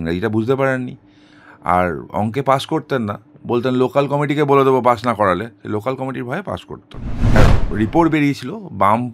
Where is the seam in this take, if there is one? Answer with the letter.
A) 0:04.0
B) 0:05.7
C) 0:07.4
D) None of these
C